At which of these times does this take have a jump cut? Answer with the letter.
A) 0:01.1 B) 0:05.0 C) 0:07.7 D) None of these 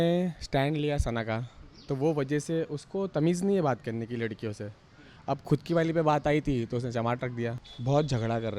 C